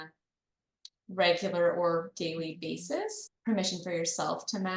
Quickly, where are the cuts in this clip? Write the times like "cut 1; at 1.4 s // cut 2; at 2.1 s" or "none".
cut 1; at 3.2 s